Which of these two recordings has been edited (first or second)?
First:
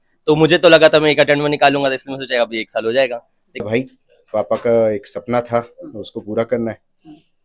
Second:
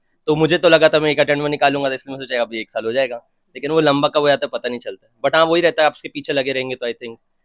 first